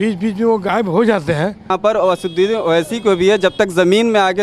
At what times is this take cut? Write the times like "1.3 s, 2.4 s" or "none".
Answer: 1.7 s